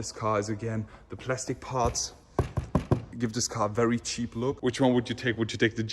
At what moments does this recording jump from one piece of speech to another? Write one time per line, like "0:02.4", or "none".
0:03.1
0:04.6